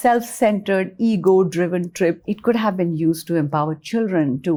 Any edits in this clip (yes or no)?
no